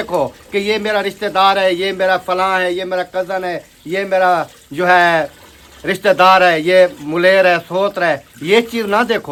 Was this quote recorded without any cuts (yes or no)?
yes